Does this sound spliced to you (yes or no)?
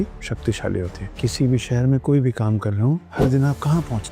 yes